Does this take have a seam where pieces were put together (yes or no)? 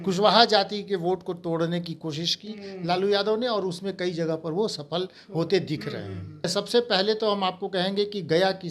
yes